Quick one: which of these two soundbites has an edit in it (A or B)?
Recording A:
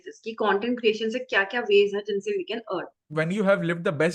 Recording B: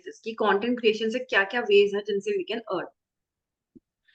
A